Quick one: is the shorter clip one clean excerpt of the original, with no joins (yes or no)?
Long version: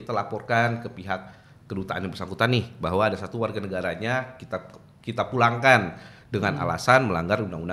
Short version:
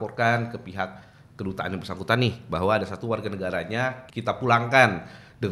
no